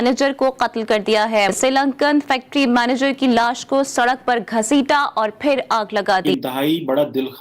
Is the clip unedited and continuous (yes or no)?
no